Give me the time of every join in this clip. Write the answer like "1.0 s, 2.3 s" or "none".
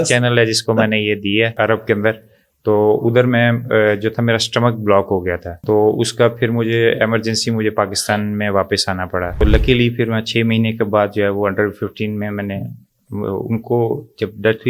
1.5 s, 5.5 s, 9.4 s